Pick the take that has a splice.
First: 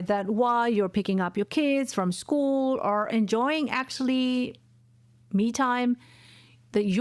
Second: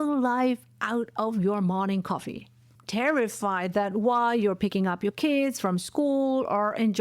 second; 1 cut; at 2.7 s

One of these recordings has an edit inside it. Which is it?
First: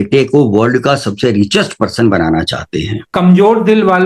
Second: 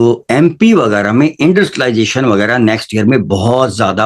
first; 1 cut; at 3.1 s

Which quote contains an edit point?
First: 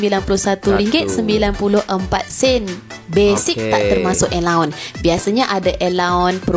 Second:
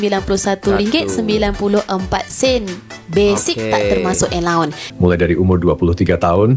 second; 1 cut; at 4.8 s

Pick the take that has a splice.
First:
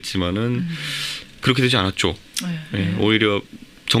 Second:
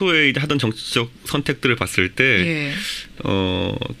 first; 1 cut; at 1.7 s

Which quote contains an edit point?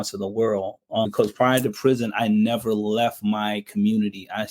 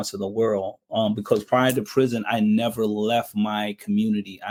first; 1 cut; at 1.1 s

